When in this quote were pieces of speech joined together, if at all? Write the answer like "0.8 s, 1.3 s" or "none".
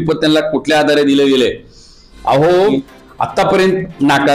2.7 s